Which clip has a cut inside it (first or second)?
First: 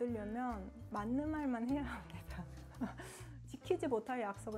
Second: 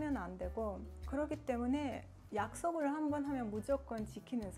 second